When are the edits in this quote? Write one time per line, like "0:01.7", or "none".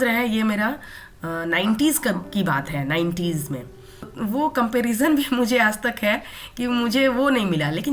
0:04.1